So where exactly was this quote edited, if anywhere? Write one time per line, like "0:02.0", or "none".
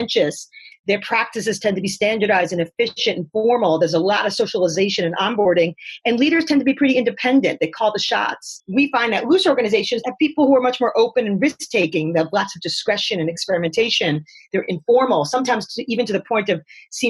none